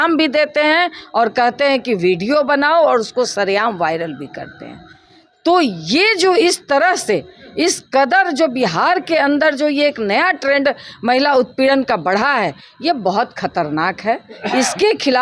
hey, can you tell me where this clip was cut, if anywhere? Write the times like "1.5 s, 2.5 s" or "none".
none